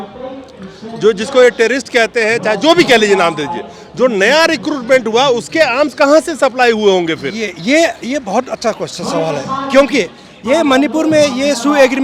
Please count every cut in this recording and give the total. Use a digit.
0